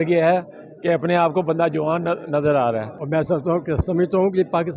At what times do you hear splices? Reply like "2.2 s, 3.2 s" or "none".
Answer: 3.0 s